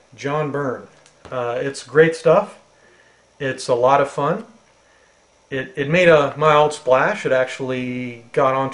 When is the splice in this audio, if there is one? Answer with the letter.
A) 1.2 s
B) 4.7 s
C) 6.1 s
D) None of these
C